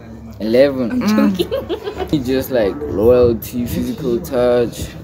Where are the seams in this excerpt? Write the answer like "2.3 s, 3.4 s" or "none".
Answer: 2.1 s